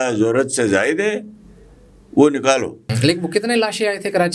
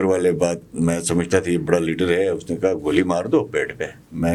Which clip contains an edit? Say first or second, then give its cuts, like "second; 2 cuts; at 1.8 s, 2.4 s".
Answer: first; 1 cut; at 2.9 s